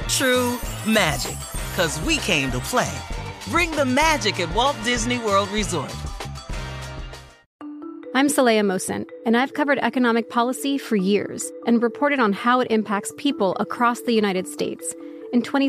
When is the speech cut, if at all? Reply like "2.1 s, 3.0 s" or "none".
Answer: 7.4 s